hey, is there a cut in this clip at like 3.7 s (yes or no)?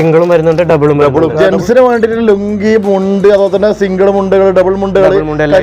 no